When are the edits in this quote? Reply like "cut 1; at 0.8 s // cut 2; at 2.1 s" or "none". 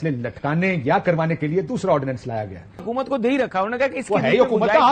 cut 1; at 2.9 s